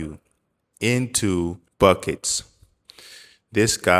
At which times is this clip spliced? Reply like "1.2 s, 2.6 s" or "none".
1.6 s